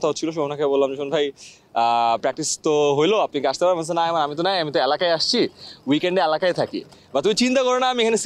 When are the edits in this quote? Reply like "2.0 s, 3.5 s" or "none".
none